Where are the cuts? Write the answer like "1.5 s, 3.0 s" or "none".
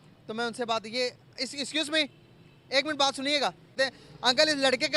3.8 s